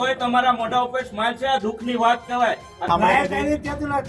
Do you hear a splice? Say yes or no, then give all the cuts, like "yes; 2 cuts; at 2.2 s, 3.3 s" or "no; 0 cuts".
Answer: no; 0 cuts